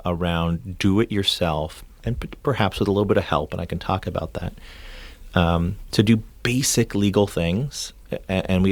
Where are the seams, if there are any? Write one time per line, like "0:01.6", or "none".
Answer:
none